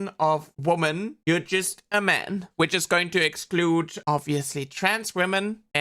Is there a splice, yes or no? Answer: no